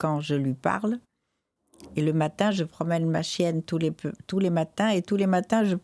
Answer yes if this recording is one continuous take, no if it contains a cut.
yes